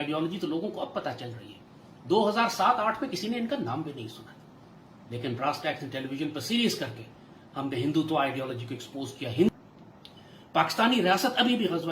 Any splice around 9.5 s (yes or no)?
yes